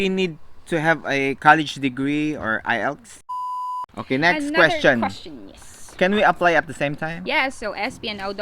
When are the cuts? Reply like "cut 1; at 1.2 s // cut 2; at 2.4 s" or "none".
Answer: cut 1; at 3.5 s